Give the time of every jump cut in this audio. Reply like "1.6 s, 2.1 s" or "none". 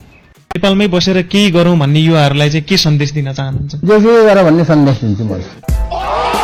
none